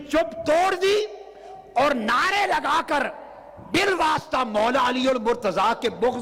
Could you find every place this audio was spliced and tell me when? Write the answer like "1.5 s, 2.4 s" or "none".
none